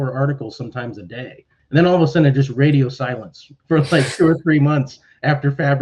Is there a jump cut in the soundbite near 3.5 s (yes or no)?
yes